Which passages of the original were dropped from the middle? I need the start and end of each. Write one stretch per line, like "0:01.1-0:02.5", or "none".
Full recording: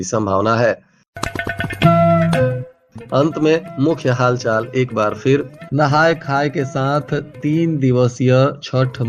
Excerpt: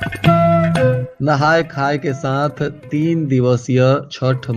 0:02.7-0:05.6

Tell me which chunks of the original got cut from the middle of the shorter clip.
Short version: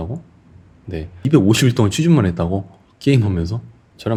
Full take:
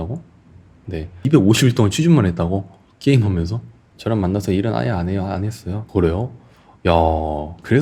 none

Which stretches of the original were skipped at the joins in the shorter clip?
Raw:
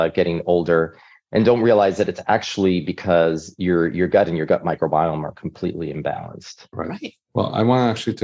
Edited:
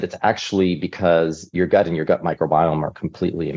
0:03.6-0:03.9

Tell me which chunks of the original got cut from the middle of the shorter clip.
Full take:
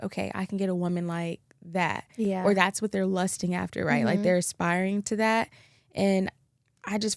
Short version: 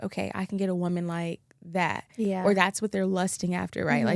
none

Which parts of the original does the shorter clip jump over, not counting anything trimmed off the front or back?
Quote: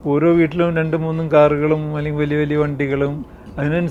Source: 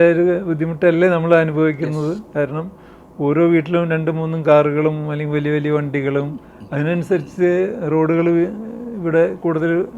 none

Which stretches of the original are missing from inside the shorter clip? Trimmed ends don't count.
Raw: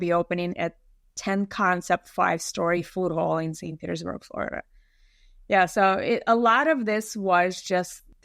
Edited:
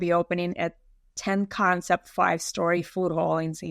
none

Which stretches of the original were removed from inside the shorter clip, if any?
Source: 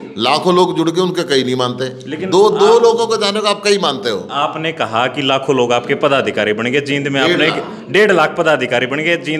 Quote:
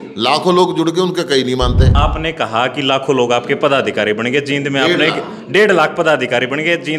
0:01.9-0:04.3

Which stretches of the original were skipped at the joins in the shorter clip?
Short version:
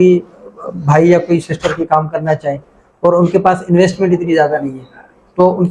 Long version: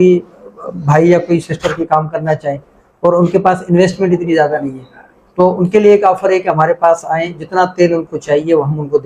none

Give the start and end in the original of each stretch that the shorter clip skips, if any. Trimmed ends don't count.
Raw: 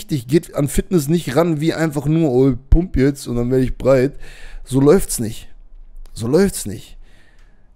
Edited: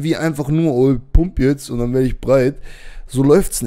none

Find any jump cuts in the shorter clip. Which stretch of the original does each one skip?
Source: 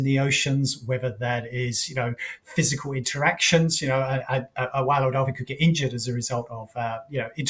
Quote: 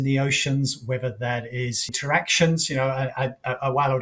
0:01.9-0:03.0

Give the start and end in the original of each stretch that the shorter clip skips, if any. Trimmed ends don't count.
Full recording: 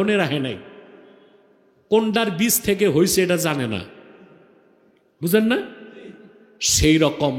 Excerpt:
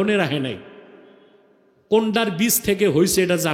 none

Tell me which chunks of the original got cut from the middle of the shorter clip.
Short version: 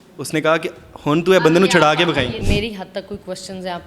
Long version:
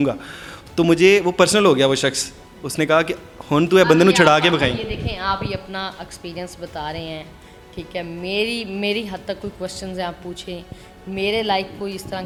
0:04.9-0:08.7

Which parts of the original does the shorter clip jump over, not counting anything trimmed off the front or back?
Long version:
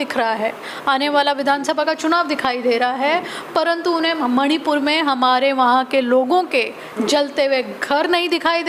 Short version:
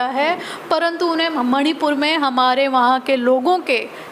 none

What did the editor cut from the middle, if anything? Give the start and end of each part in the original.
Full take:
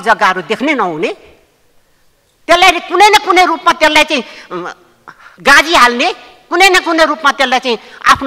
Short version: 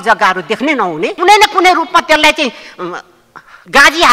0:01.2-0:02.9

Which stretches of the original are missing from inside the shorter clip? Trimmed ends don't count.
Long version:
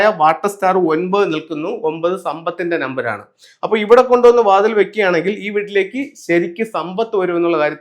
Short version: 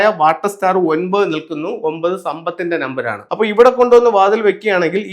0:03.2-0:03.5

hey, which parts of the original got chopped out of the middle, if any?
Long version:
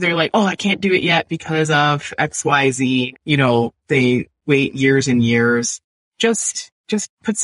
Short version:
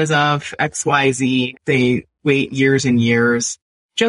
0:03.2-0:03.8

